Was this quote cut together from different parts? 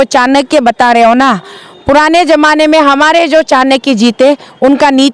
no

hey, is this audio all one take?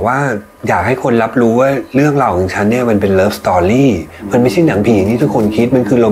yes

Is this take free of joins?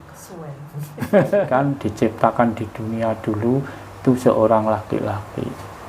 no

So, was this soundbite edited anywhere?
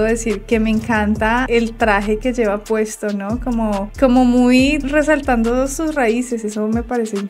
no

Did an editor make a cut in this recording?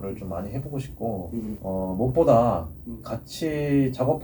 yes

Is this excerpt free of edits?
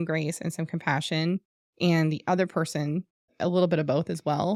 yes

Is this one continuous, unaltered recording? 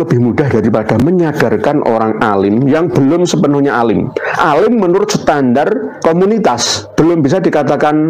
no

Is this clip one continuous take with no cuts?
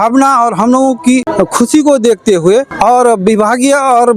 no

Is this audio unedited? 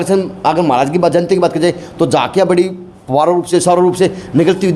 yes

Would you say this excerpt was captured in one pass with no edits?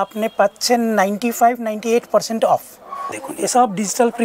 no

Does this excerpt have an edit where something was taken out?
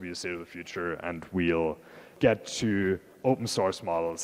yes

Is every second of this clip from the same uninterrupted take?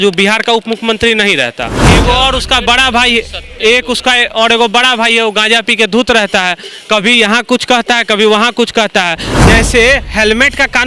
no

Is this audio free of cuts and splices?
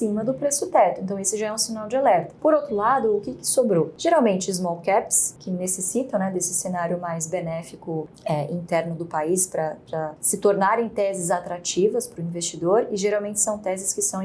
yes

